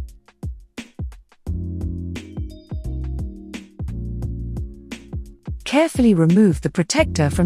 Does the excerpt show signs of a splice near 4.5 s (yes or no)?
yes